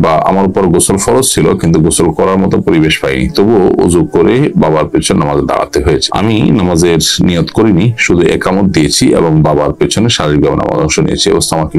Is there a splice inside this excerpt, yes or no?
no